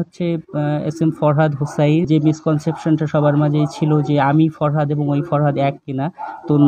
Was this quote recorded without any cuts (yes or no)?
no